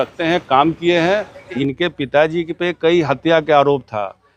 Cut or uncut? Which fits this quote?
cut